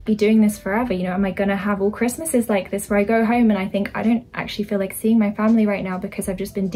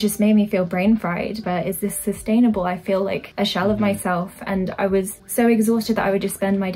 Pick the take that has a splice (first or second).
second